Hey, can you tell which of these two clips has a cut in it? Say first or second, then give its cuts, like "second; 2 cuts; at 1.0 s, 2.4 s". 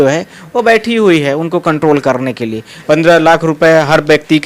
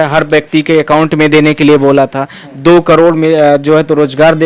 first; 1 cut; at 2.7 s